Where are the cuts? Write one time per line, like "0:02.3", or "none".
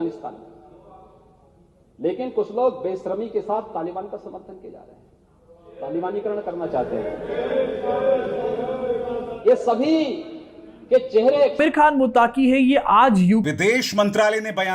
0:13.5